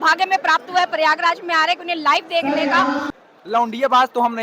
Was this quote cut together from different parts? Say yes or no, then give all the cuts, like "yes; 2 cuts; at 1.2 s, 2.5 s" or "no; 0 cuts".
yes; 1 cut; at 3.0 s